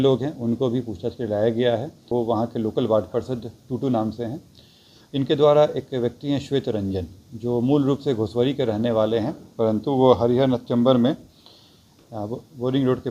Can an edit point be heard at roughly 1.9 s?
yes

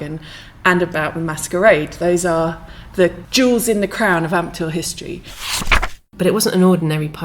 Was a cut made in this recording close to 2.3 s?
no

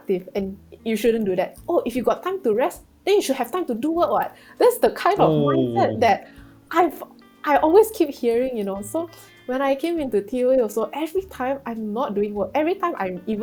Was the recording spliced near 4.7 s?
no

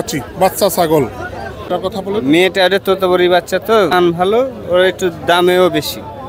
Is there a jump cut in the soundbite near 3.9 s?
yes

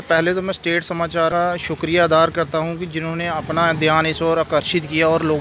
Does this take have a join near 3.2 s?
no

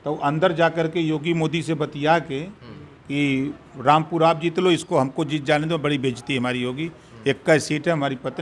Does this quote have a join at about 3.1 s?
no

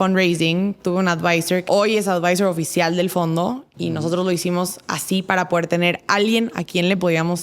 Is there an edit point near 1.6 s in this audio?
yes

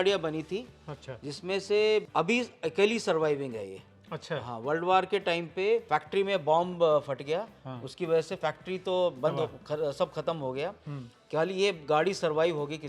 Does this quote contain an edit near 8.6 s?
no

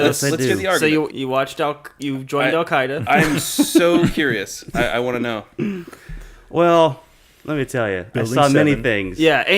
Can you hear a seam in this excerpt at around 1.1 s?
yes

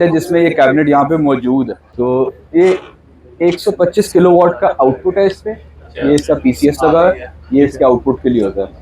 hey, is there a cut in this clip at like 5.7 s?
no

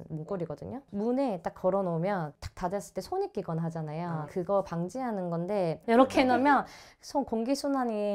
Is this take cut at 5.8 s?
yes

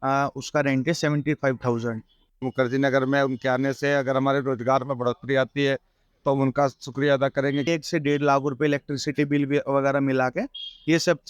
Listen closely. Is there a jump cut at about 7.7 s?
yes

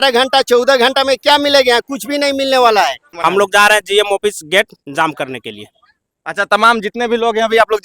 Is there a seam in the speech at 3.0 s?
yes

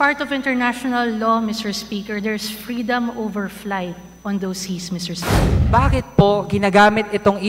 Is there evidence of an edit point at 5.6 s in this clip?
yes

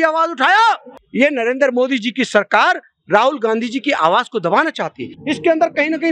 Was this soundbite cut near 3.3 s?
no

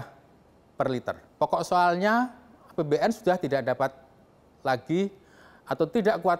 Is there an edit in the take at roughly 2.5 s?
no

